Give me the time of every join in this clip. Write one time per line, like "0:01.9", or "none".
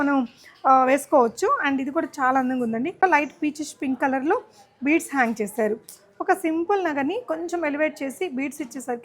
0:03.0